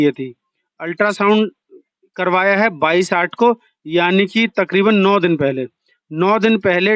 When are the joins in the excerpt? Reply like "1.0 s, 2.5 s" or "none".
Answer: none